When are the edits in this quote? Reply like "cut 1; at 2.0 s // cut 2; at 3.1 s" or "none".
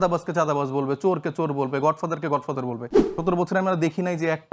cut 1; at 3.0 s